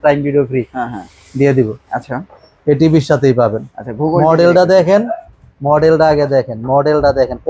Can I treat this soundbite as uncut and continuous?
yes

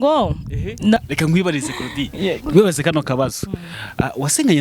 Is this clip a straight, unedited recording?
no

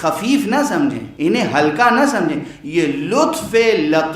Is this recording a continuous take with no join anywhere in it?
no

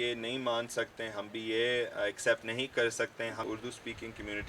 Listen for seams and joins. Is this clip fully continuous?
no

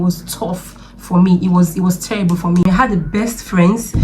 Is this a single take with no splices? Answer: no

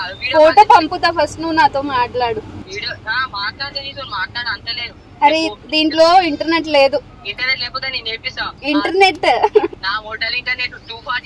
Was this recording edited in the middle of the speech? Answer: yes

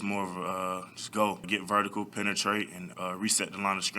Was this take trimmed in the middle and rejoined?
yes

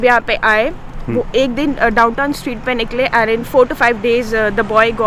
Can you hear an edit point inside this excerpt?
no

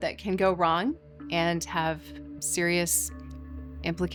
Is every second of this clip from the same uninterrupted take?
yes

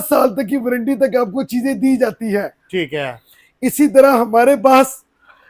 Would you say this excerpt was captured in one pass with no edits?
yes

